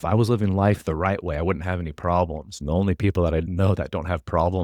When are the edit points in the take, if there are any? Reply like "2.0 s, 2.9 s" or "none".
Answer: 2.5 s, 3.5 s